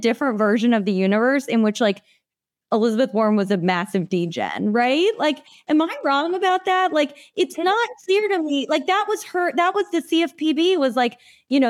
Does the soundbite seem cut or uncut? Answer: uncut